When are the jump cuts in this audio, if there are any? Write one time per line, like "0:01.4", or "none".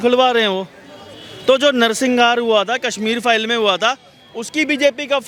none